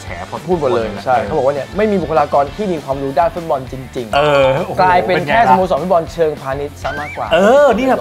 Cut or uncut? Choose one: uncut